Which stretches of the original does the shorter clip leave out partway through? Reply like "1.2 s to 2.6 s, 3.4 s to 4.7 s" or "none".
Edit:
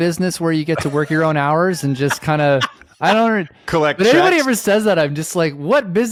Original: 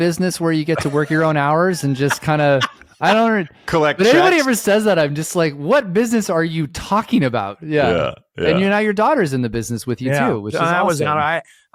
none